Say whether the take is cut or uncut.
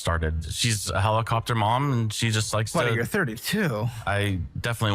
cut